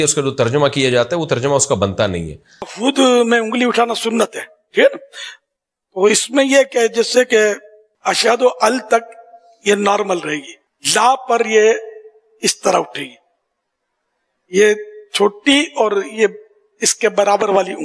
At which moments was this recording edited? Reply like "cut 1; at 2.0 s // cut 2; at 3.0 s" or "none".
cut 1; at 2.7 s